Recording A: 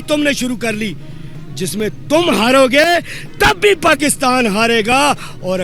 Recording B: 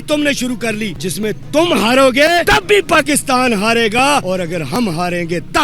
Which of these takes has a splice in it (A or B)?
B